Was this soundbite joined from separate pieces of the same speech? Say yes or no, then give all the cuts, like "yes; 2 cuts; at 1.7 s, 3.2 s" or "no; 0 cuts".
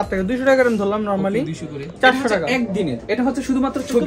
yes; 1 cut; at 1.8 s